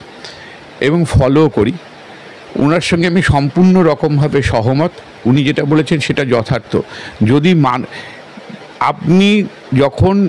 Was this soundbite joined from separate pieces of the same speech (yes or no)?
no